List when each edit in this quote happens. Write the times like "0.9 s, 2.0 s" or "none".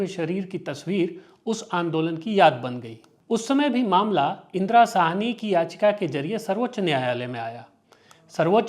none